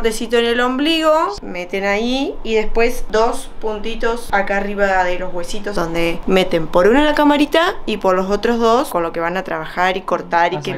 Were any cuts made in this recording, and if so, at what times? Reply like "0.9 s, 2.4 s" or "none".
1.4 s, 3.0 s, 4.2 s, 5.8 s, 8.9 s